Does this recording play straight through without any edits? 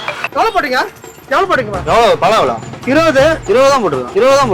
no; 2 cuts; at 1.8 s, 3.4 s

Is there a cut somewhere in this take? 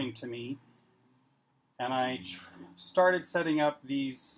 no; 0 cuts

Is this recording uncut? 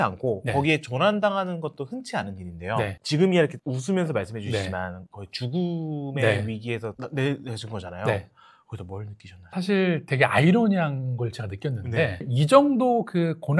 yes; 0 cuts

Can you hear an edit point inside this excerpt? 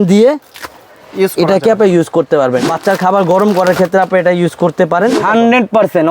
yes; 2 cuts; at 2.6 s, 5.2 s

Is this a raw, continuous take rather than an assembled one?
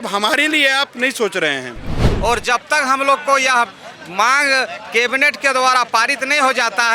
no; 1 cut; at 2.0 s

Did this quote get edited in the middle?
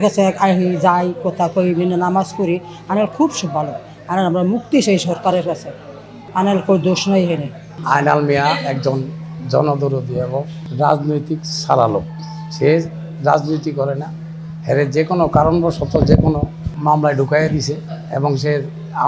no; 0 cuts

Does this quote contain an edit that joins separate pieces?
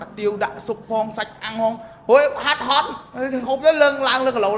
no; 0 cuts

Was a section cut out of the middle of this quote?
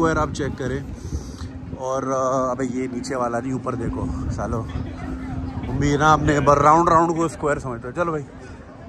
no; 0 cuts

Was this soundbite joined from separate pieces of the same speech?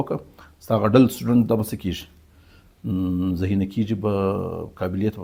no; 0 cuts

